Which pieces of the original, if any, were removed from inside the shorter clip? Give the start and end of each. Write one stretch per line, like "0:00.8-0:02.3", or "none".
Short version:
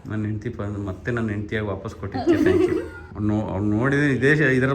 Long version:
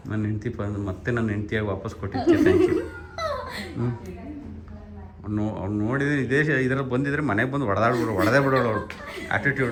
0:03.0-0:05.1